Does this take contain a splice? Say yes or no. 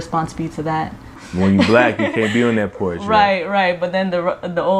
yes